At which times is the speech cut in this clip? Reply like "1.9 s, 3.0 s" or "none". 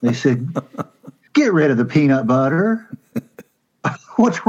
1.2 s